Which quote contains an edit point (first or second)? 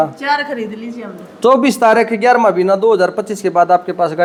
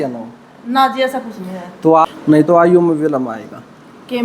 second